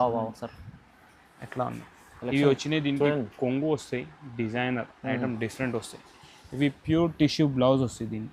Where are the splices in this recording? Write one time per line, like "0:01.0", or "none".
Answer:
none